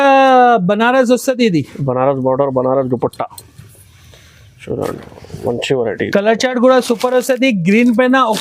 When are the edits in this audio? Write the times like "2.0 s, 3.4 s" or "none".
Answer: none